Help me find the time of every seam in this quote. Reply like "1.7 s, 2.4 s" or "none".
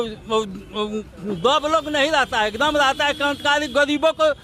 none